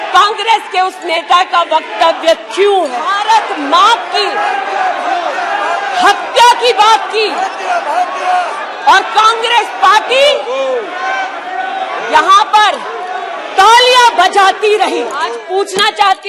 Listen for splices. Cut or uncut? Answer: cut